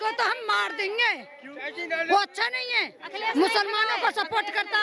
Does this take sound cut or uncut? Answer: uncut